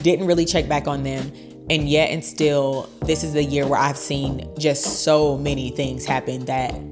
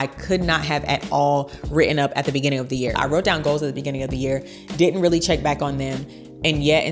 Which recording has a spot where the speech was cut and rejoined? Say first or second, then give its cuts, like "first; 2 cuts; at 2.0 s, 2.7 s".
second; 1 cut; at 3.0 s